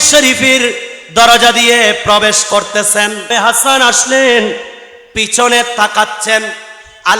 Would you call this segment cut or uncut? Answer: cut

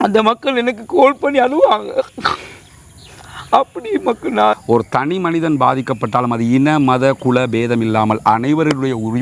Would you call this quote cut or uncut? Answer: cut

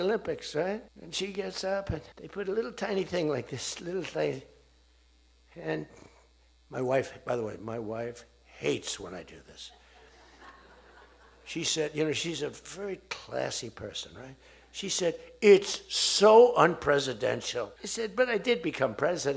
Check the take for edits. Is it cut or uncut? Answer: cut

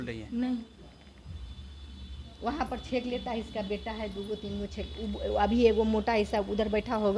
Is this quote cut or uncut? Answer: uncut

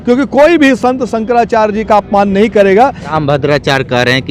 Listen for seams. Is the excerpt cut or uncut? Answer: cut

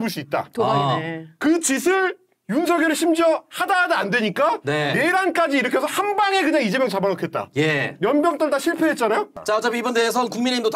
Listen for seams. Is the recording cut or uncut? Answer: cut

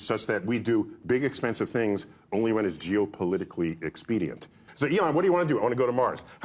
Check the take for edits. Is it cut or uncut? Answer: cut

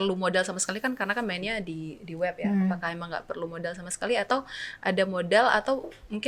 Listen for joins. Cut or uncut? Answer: uncut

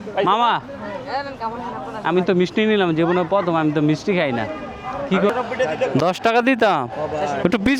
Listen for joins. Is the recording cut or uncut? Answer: cut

